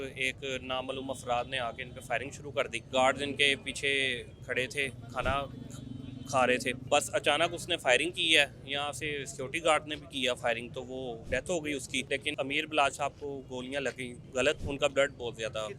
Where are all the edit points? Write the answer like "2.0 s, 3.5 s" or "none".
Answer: 2.9 s, 6.8 s, 11.2 s, 12.2 s, 14.4 s